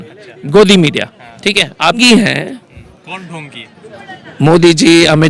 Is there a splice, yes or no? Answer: yes